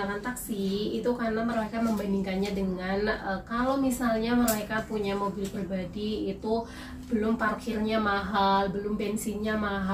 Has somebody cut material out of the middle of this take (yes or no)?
no